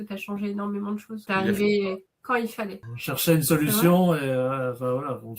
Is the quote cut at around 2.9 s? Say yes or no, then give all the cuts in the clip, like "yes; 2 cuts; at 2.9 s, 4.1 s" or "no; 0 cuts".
yes; 2 cuts; at 1.2 s, 2.9 s